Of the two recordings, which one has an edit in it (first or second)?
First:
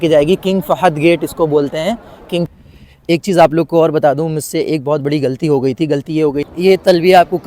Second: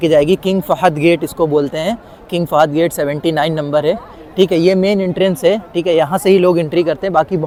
first